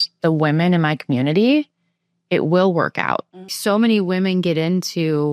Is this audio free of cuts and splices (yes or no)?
no